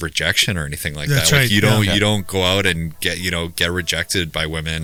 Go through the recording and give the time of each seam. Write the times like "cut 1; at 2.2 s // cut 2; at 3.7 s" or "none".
none